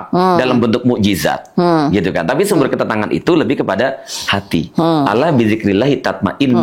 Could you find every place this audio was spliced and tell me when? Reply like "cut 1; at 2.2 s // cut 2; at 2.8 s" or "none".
none

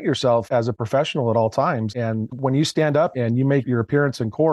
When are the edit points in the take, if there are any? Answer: cut 1; at 1.9 s // cut 2; at 3.1 s

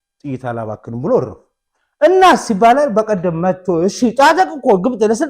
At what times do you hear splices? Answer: none

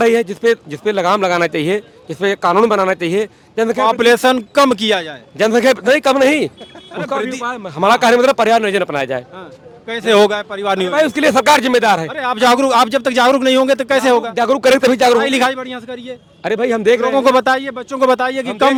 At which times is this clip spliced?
none

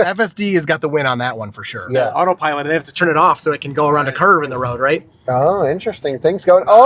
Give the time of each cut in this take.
cut 1; at 2.1 s

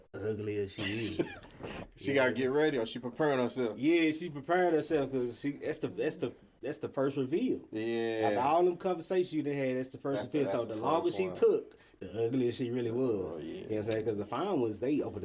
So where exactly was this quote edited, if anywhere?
none

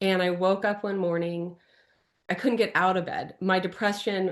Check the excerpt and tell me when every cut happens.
cut 1; at 2.3 s

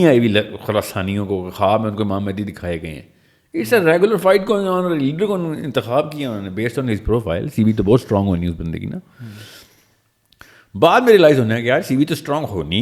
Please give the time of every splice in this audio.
none

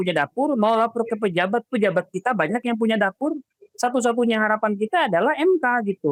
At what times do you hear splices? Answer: none

